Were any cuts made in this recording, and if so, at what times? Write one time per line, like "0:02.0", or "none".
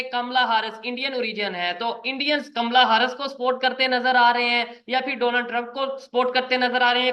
none